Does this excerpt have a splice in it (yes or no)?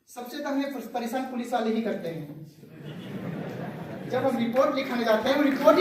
no